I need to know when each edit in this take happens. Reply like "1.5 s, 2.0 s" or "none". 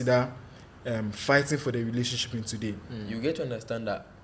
3.0 s

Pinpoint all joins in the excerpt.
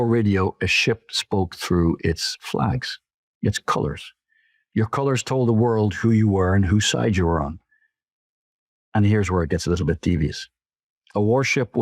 none

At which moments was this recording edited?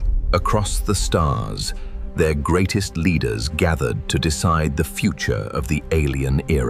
none

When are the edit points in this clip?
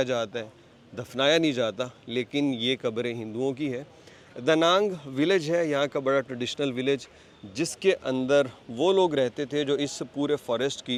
none

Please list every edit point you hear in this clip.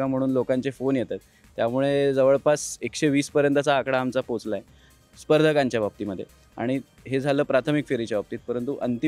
none

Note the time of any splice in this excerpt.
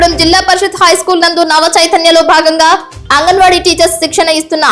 none

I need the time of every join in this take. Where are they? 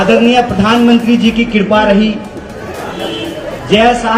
none

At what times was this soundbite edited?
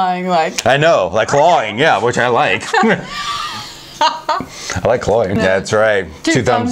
5.4 s

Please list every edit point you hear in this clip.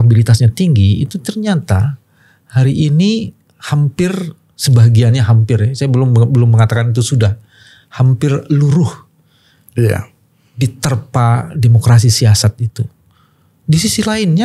none

